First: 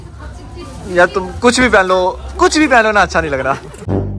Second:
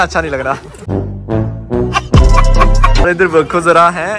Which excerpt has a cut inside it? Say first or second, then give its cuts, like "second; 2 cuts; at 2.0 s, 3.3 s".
second; 1 cut; at 3.0 s